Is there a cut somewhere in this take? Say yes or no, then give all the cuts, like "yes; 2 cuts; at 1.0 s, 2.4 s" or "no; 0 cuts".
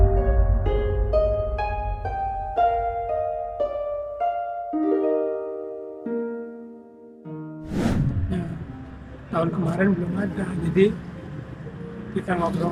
no; 0 cuts